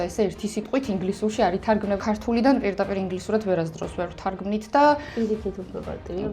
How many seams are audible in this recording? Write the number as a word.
one